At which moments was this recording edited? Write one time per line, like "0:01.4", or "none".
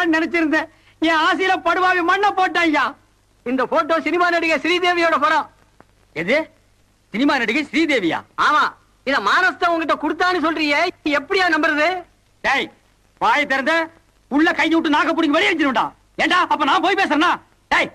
0:09.9